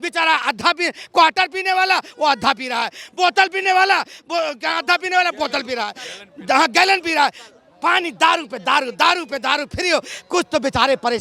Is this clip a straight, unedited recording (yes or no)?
yes